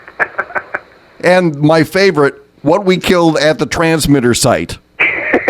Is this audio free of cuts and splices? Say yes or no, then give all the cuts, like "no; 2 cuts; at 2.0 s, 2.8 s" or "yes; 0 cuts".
no; 2 cuts; at 1.0 s, 2.5 s